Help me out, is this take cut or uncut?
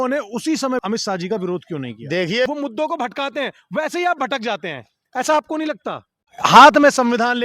cut